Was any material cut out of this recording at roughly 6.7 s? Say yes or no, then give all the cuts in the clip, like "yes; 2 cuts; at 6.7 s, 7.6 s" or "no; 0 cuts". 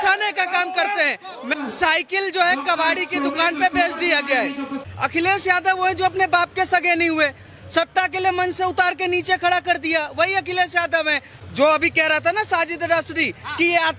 no; 3 cuts; at 1.5 s, 4.8 s, 11.3 s